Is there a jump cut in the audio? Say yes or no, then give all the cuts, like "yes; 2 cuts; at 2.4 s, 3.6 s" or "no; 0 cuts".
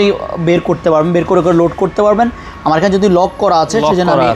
no; 0 cuts